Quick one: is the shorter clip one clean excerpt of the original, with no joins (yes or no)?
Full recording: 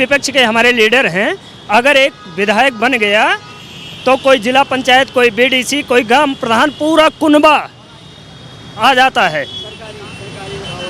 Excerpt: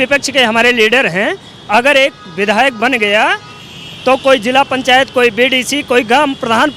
yes